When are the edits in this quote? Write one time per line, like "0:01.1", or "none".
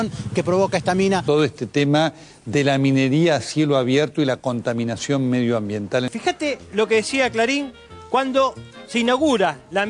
0:06.1